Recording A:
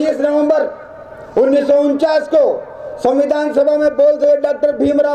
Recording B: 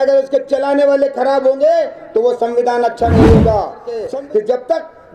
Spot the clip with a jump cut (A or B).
B